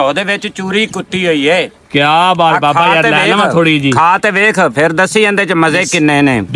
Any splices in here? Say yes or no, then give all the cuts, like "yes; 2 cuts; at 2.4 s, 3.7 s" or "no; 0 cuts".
no; 0 cuts